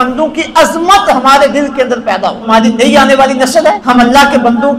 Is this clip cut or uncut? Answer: cut